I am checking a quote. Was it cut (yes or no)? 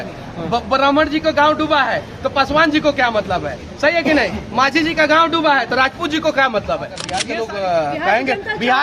yes